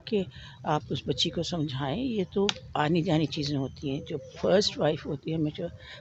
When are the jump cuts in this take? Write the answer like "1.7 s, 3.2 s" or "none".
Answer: none